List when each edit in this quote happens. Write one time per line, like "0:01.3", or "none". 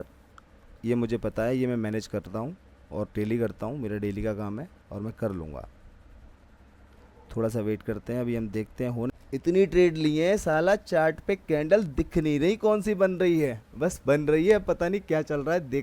0:09.1